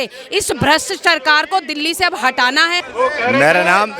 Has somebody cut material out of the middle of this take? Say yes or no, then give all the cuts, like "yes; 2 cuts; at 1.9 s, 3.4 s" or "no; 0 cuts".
yes; 1 cut; at 2.9 s